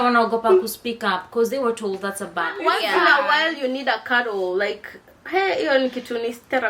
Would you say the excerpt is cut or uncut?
cut